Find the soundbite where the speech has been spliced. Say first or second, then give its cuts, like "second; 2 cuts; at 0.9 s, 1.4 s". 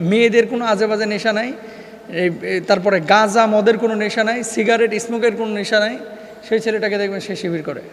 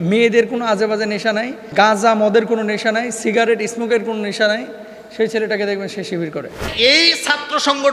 second; 2 cuts; at 1.7 s, 6.7 s